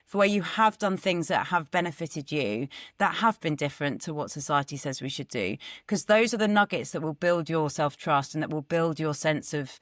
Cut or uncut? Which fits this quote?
uncut